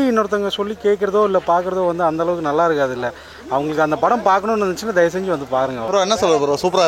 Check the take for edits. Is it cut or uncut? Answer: uncut